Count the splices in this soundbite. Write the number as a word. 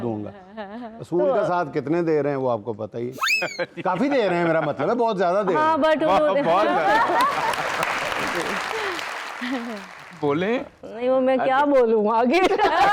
zero